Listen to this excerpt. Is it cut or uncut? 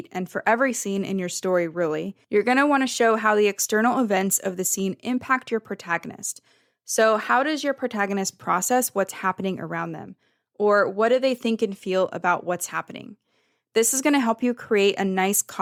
uncut